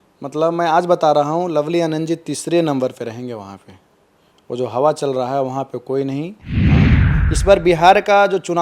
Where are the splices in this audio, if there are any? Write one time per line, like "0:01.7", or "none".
0:06.7